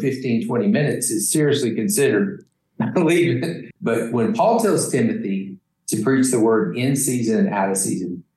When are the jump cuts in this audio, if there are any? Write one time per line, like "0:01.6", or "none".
0:03.6